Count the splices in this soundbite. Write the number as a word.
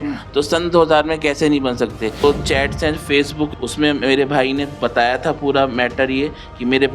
two